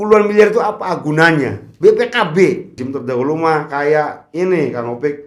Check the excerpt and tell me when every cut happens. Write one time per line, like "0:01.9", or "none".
0:02.7